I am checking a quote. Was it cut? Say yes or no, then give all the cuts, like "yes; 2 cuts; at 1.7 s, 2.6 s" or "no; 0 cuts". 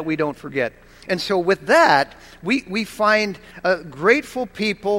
no; 0 cuts